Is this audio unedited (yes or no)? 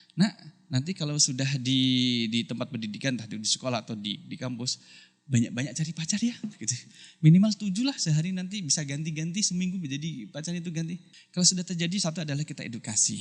no